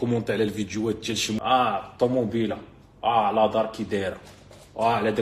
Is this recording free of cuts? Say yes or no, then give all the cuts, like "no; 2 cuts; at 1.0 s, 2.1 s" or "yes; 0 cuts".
no; 1 cut; at 1.4 s